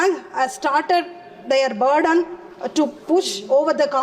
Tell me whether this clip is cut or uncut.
uncut